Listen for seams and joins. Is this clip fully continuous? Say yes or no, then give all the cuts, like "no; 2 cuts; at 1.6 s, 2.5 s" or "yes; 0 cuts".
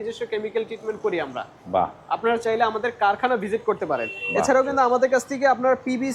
yes; 0 cuts